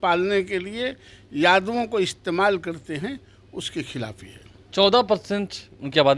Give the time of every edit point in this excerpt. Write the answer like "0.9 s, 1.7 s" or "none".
none